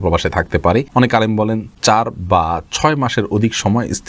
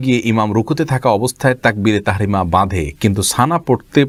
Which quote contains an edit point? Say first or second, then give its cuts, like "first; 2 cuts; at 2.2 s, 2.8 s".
first; 2 cuts; at 0.9 s, 1.7 s